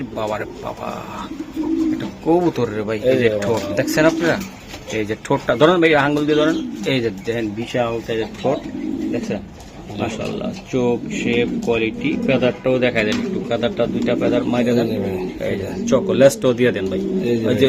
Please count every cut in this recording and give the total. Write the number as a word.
zero